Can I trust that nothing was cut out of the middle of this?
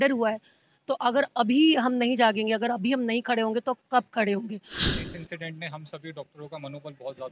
no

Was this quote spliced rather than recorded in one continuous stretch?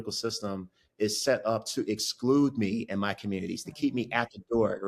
no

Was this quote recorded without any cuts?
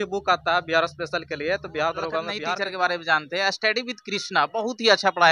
no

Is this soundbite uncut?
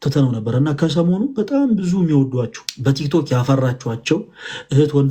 no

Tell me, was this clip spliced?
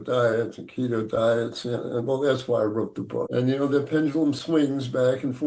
yes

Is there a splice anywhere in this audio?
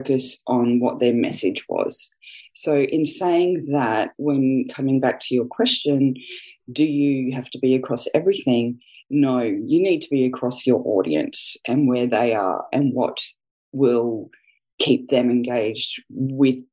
no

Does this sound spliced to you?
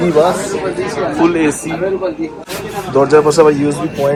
no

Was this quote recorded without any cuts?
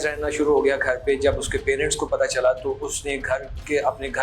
yes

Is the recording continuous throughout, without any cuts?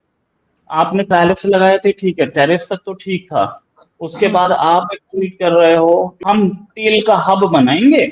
no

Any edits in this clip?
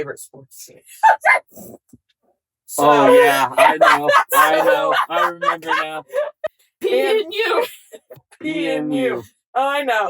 yes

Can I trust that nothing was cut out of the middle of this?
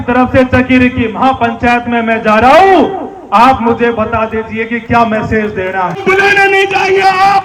no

